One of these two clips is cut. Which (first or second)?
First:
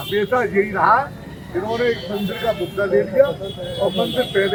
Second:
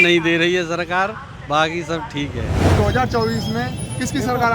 second